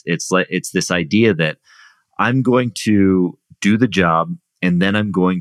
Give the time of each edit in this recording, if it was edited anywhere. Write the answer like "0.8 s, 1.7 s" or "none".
none